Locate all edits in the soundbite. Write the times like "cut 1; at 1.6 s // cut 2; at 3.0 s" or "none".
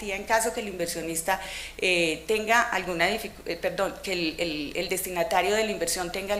cut 1; at 4.3 s